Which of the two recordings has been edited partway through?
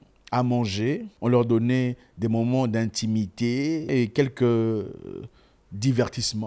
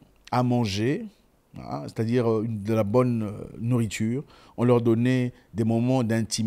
first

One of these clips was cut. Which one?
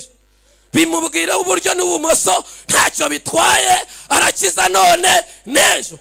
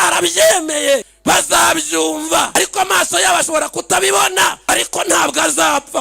second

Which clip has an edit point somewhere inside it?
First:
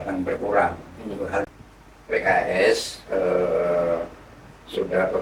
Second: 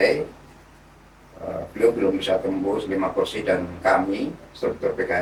first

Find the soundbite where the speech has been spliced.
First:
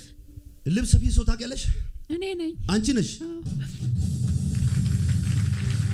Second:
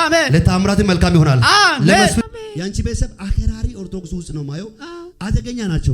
second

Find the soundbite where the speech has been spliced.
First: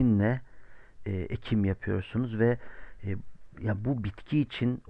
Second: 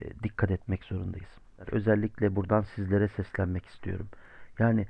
second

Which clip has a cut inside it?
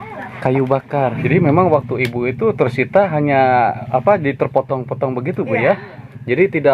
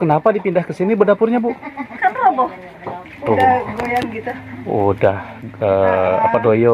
first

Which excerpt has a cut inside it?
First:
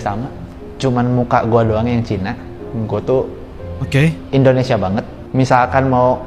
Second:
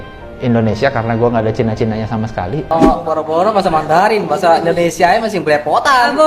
second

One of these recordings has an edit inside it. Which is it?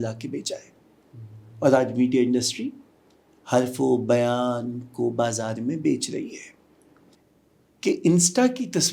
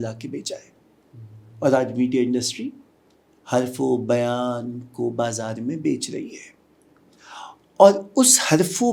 first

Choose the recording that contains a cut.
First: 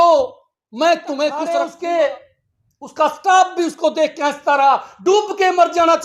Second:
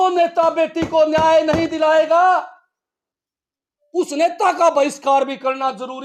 first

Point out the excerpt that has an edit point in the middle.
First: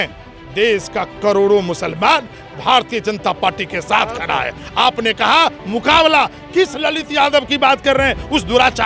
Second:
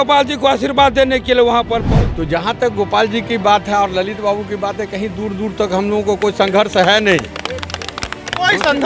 second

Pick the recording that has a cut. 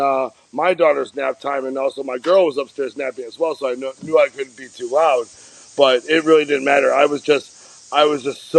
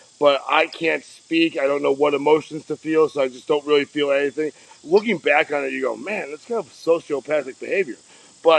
second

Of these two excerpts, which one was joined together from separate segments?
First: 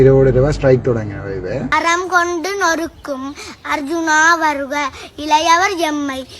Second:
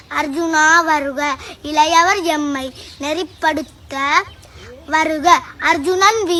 first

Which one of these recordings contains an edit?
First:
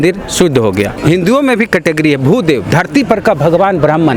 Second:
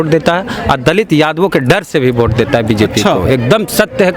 first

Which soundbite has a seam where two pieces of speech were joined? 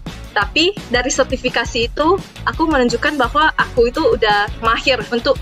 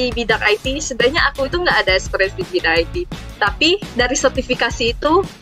first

